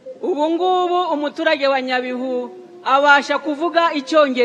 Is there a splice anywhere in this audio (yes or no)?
no